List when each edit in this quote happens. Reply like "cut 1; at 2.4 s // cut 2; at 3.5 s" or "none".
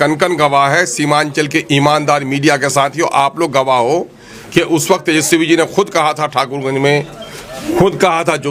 none